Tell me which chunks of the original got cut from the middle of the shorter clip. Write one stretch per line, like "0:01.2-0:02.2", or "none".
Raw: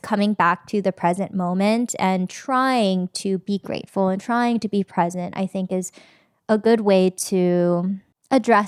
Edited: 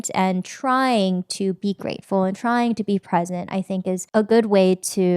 0:05.9-0:06.4